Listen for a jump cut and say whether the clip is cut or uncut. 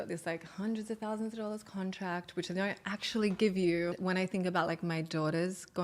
cut